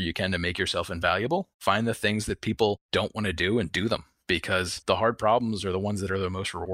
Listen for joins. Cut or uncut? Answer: cut